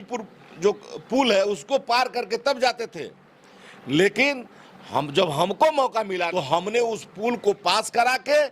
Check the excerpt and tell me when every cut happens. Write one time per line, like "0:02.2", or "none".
0:06.3